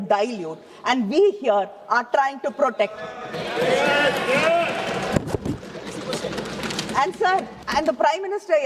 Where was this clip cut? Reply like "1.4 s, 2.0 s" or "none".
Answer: 7.6 s